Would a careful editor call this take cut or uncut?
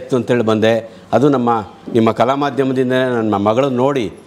uncut